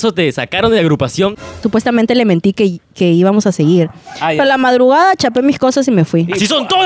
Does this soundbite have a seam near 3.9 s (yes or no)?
no